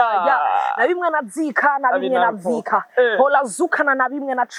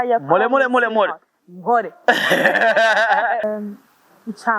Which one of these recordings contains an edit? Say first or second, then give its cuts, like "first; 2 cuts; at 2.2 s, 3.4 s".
second; 1 cut; at 3.4 s